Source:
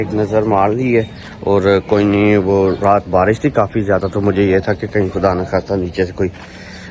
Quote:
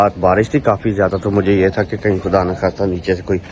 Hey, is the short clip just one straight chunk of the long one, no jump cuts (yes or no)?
yes